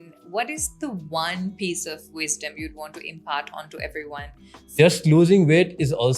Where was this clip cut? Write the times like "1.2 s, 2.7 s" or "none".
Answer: 4.7 s